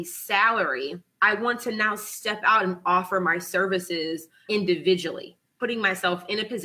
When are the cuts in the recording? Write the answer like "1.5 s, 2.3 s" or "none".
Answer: 1.0 s, 4.4 s, 5.5 s